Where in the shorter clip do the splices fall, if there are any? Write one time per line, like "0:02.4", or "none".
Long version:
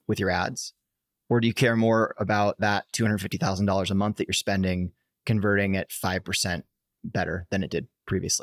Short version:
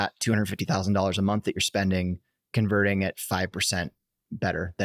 none